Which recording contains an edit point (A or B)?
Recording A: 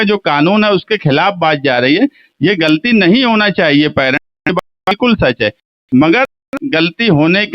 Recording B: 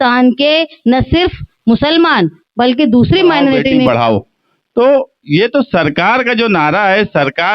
B